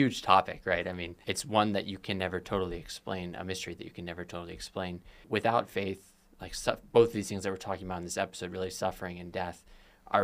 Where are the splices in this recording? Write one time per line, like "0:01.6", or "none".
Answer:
0:01.1
0:05.1